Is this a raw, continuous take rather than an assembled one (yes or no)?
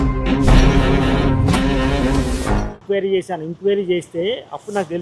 no